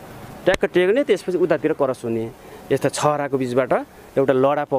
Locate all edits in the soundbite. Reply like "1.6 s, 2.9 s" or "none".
none